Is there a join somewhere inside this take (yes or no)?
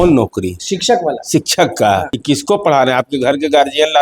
yes